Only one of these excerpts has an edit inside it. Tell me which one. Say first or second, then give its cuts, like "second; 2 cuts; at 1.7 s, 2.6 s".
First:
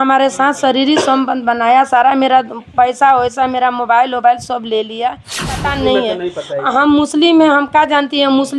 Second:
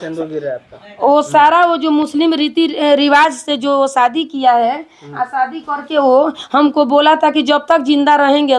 first; 1 cut; at 5.5 s